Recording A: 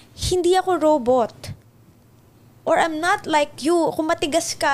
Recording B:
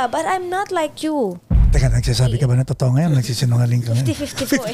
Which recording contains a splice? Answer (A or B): B